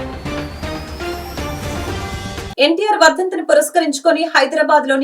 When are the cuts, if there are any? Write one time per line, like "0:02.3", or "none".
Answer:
0:02.3